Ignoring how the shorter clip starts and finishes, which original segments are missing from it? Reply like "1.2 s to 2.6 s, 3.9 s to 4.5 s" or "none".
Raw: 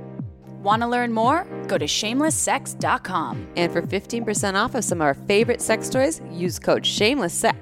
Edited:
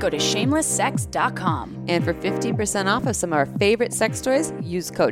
none